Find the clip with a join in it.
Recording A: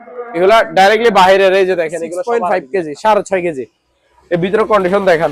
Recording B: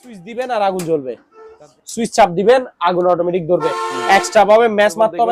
A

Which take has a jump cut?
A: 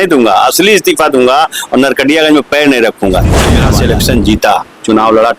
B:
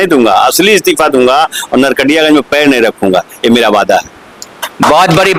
A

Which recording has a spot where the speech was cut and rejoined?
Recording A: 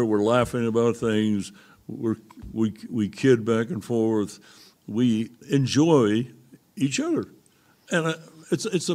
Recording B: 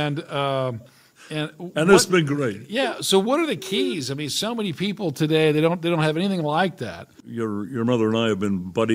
B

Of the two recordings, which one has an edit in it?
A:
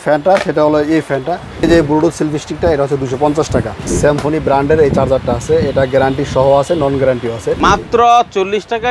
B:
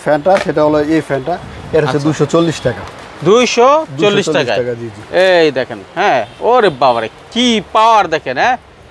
A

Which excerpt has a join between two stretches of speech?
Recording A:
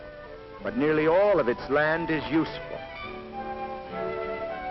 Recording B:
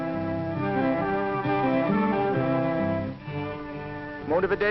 B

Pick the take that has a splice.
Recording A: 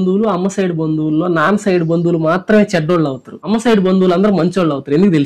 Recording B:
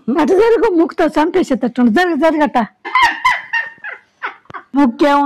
B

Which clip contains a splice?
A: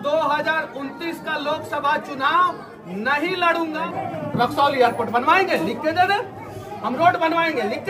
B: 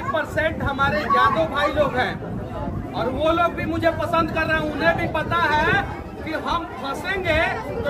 A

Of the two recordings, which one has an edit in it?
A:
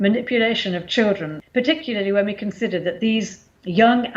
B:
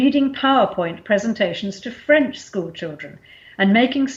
A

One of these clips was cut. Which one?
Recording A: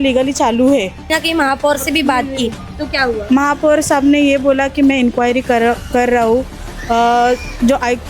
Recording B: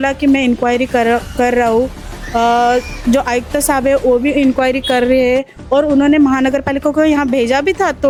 A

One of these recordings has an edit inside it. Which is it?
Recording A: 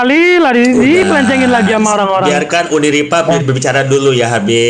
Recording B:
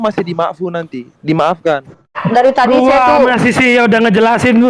B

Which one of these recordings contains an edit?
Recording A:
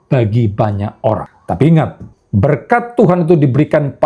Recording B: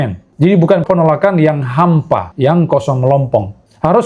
A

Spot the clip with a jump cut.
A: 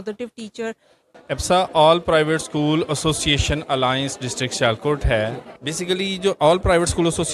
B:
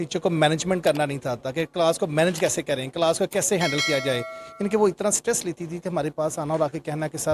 A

